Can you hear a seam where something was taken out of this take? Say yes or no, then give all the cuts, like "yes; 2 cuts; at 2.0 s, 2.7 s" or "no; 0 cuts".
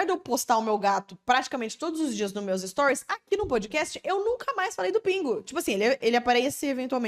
no; 0 cuts